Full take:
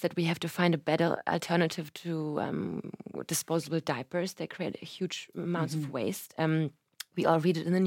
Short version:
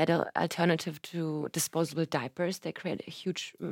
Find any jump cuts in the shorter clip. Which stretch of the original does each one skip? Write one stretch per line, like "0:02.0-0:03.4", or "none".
0:02.3-0:03.2